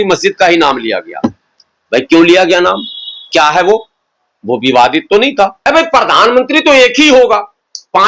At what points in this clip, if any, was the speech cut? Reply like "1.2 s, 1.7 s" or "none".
5.6 s